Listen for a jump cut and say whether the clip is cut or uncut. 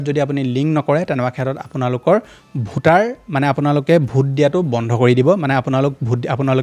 uncut